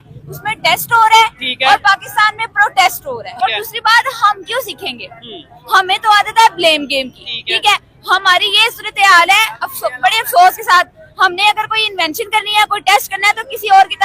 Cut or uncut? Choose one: cut